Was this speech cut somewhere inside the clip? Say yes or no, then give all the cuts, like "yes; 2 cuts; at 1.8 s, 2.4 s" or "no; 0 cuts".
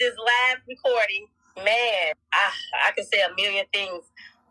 yes; 2 cuts; at 1.4 s, 2.2 s